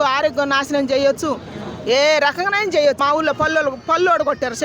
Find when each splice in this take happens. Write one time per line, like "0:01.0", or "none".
0:03.0